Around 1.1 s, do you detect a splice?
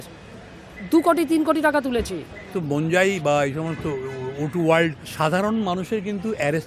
no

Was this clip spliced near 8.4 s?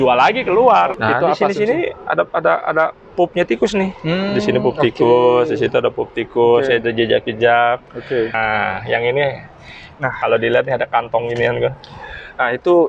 yes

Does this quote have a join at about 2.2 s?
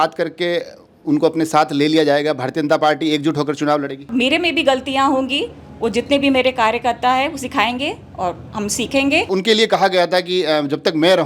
no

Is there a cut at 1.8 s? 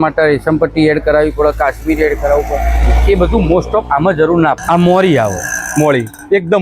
no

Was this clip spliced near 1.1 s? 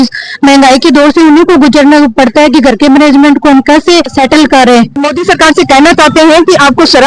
no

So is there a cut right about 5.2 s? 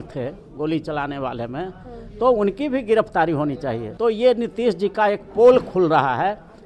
no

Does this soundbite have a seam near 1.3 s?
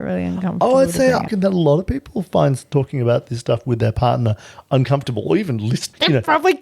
yes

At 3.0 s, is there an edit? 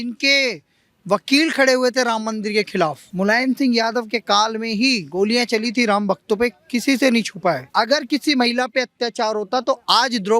yes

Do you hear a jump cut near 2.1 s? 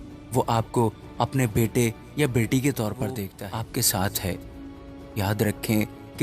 no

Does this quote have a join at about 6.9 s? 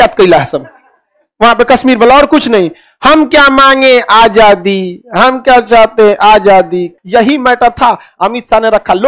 yes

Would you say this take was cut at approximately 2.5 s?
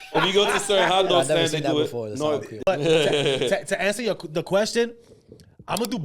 yes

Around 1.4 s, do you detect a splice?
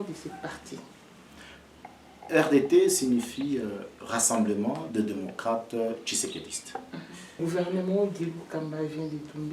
no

